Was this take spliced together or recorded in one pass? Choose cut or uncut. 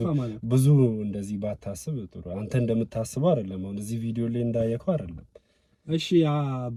uncut